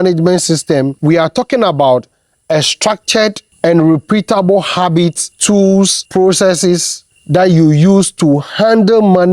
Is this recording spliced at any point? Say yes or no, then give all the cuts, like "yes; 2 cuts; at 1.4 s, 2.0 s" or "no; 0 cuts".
yes; 2 cuts; at 0.9 s, 5.7 s